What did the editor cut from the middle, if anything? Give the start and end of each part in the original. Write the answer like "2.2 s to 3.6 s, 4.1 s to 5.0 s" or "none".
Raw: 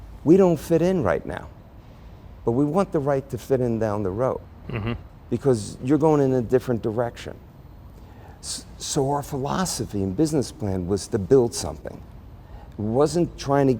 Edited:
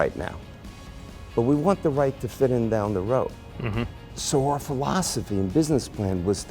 5.1 s to 8.7 s

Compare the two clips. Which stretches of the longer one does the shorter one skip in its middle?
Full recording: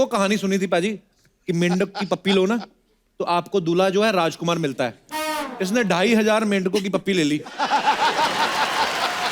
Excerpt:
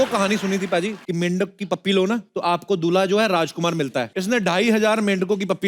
1.0 s to 1.4 s, 2.7 s to 3.1 s, 5.0 s to 5.6 s

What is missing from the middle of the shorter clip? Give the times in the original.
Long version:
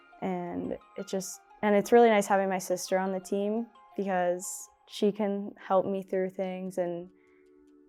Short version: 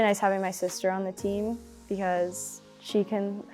none

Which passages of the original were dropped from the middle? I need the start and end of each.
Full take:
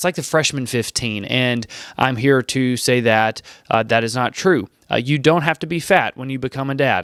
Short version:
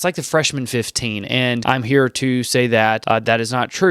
1.6 s to 2.0 s, 3.3 s to 3.6 s

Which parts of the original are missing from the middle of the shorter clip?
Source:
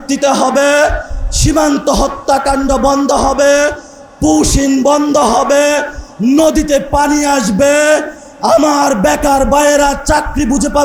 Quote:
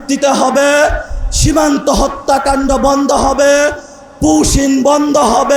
none

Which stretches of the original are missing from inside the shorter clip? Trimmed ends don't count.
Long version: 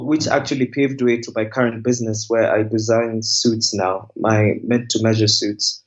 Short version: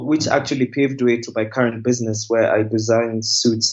none

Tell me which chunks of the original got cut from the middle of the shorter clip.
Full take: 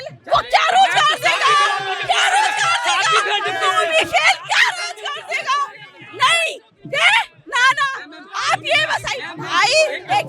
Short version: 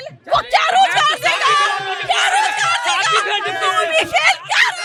none

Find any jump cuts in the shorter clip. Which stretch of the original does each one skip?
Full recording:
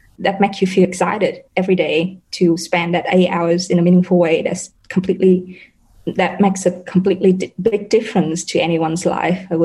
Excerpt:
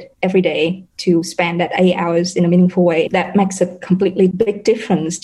4.4 s to 6.1 s, 7.4 s to 7.6 s

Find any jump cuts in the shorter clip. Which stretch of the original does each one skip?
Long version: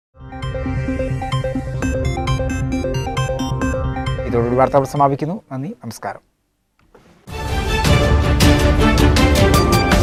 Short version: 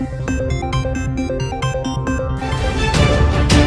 4.1 s to 7.5 s

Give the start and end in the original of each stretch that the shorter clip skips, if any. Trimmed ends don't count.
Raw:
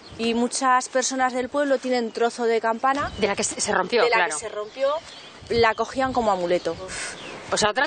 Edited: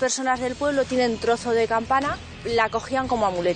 3.1 s to 5.2 s

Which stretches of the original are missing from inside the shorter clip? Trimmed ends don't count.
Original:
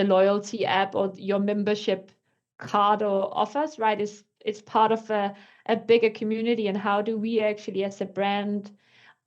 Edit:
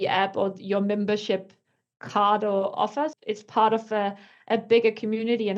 3.7 s to 4.3 s

